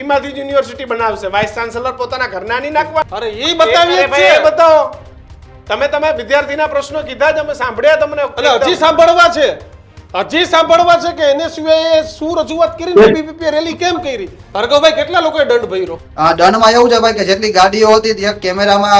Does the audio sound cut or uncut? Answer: cut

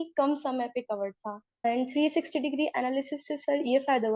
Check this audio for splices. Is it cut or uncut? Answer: cut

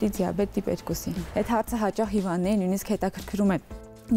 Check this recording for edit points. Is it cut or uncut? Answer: cut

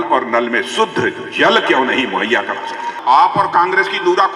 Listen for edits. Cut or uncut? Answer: cut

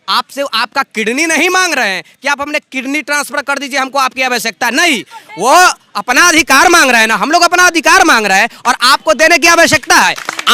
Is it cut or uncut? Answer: uncut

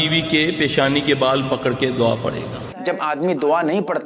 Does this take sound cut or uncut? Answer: cut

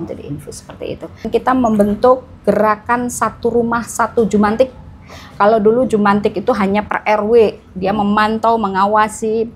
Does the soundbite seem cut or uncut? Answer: cut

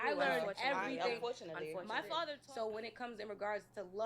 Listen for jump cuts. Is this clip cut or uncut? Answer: cut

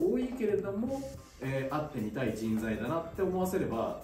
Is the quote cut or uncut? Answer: uncut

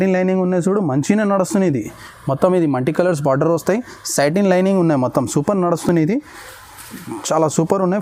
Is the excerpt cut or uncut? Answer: uncut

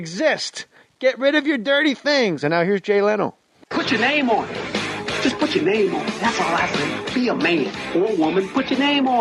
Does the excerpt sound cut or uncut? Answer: uncut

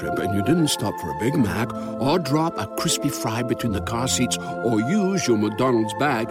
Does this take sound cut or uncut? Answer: uncut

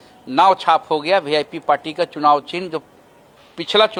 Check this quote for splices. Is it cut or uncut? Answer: uncut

